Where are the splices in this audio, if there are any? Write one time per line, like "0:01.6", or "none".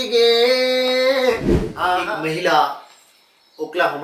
0:02.0